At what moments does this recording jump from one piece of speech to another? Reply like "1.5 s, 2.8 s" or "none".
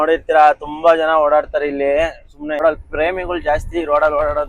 2.6 s